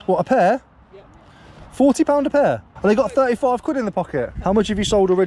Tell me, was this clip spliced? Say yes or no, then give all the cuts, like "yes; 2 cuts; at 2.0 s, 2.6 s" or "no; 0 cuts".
yes; 2 cuts; at 2.7 s, 4.3 s